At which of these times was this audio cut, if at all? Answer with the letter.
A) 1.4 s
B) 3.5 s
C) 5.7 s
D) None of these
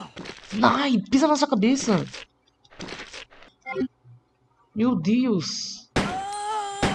B